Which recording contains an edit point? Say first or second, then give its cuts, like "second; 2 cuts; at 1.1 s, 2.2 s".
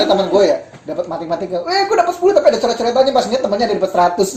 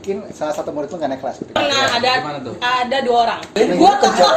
second; 2 cuts; at 1.6 s, 3.4 s